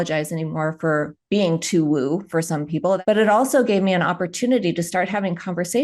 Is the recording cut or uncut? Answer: cut